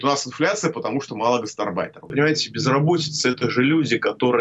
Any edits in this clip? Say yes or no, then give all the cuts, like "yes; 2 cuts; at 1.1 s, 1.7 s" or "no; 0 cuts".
yes; 1 cut; at 2.1 s